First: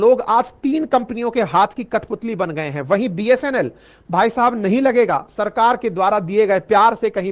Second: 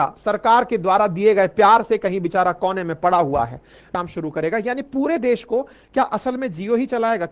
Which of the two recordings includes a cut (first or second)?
second